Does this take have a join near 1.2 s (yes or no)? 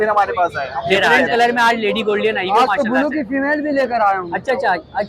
yes